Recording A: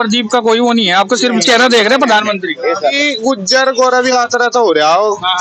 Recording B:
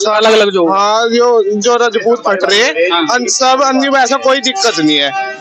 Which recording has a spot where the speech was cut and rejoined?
A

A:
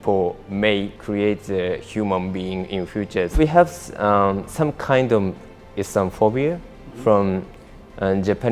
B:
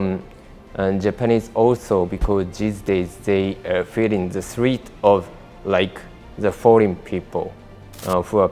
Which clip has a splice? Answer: A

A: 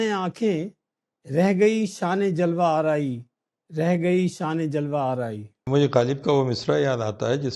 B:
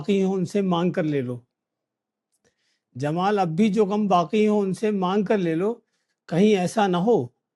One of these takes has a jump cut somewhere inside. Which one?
A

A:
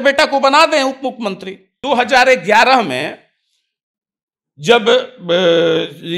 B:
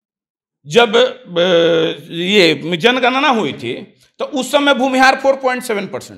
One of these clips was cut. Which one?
A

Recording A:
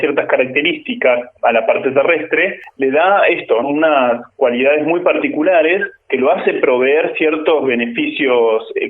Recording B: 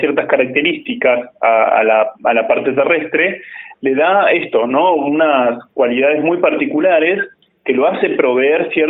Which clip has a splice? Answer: A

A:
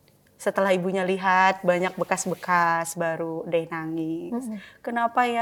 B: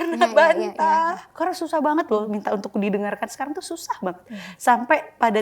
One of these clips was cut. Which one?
B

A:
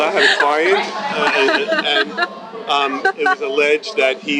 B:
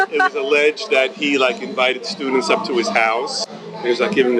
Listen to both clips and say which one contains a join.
B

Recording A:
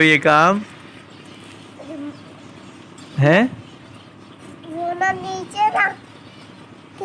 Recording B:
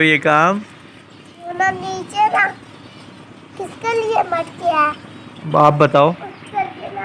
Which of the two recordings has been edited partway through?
B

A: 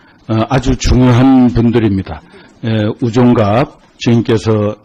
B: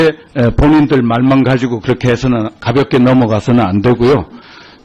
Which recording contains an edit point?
B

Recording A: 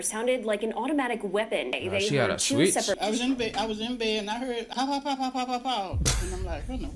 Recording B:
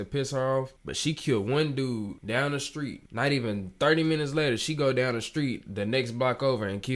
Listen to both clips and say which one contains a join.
A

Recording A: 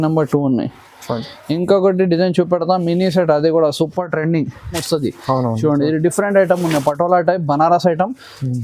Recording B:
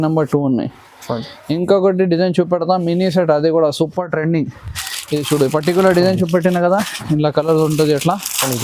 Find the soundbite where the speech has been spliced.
A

